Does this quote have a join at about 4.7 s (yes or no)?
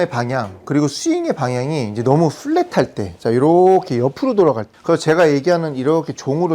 yes